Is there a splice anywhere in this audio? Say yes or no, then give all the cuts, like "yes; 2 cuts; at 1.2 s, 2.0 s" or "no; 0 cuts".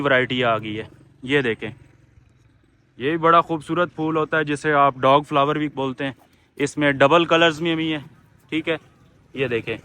no; 0 cuts